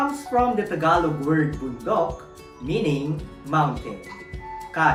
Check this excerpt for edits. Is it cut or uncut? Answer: uncut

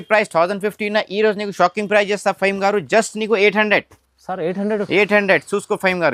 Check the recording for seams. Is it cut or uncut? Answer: uncut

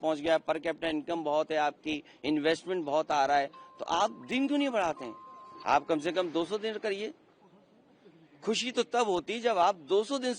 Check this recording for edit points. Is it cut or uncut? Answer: uncut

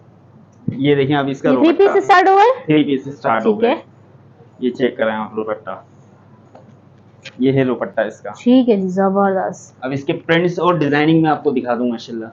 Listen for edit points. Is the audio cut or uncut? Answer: uncut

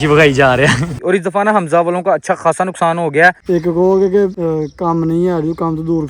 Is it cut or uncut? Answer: cut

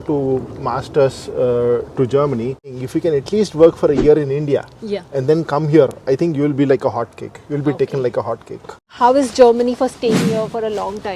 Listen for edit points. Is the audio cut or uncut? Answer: cut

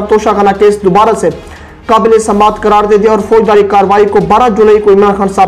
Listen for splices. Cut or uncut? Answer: uncut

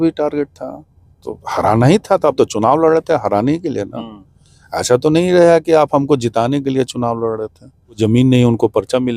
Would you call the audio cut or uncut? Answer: cut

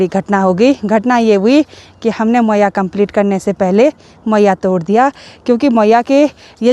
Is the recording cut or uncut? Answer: uncut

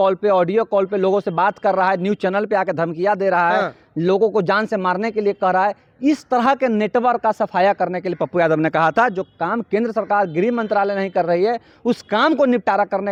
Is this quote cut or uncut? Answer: uncut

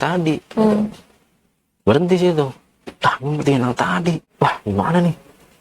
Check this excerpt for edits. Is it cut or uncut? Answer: cut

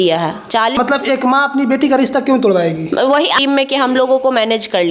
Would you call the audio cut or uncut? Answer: cut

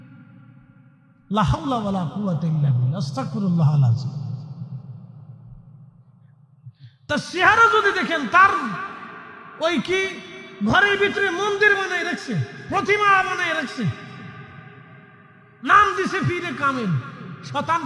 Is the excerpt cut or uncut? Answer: uncut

